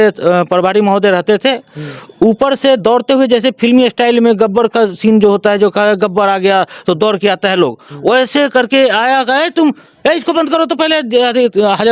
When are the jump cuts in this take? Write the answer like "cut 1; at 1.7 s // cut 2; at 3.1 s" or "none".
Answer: none

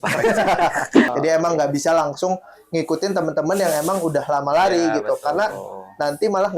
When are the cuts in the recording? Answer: cut 1; at 1.1 s

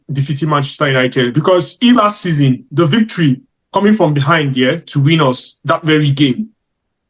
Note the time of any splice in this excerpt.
cut 1; at 2.0 s

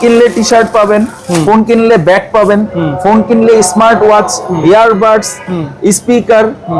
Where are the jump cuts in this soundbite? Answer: none

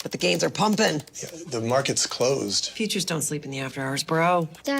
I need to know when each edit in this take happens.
cut 1; at 2.1 s

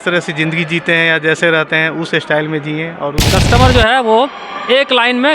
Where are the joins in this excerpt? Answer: cut 1; at 3.2 s

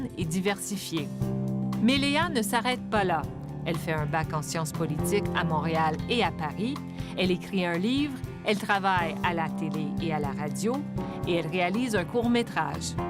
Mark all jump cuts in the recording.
cut 1; at 1.1 s

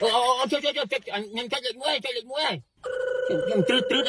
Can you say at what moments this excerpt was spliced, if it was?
cut 1; at 2.7 s

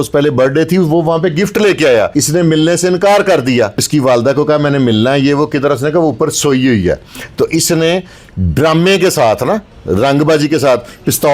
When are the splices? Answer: cut 1; at 2.1 s // cut 2; at 3.9 s

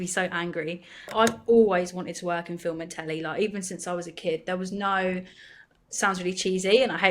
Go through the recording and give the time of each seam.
cut 1; at 1.1 s

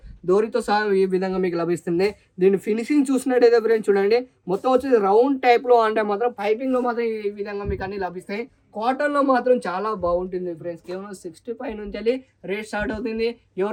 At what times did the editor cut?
none

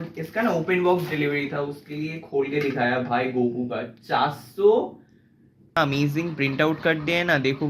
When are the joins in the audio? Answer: cut 1; at 5.8 s

